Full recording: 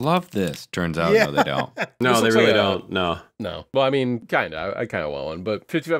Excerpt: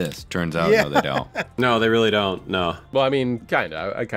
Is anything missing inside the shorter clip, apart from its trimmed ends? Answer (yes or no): yes